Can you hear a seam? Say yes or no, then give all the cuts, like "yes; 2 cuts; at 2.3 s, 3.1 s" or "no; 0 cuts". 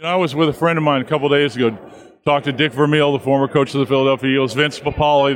no; 0 cuts